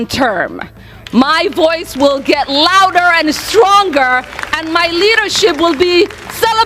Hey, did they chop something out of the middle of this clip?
no; 0 cuts

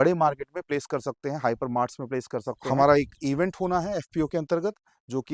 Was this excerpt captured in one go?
no; 1 cut; at 2.6 s

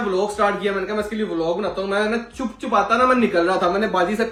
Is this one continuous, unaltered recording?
yes; 0 cuts

